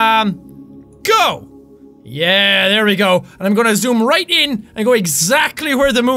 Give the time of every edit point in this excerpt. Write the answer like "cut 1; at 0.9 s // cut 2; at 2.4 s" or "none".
none